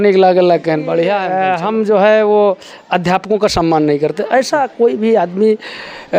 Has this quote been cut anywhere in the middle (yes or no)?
yes